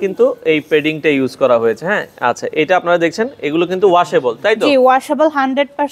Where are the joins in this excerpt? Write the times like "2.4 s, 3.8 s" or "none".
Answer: none